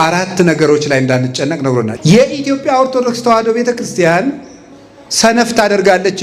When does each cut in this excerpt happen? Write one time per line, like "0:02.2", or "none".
0:01.9